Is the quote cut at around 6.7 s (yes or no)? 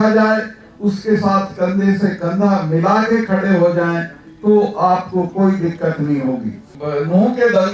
yes